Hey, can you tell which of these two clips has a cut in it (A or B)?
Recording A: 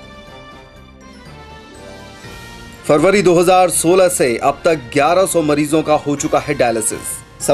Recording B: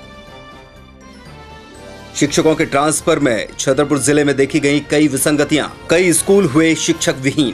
A